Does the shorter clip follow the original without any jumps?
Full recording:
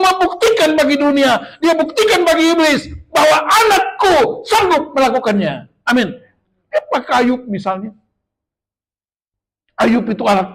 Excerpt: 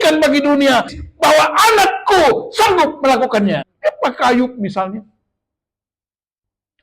no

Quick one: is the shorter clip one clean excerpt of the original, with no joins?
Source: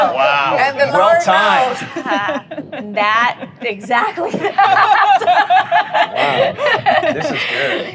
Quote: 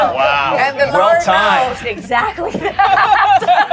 no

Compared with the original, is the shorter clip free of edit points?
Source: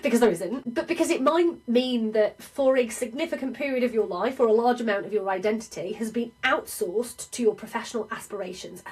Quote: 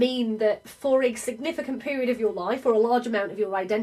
yes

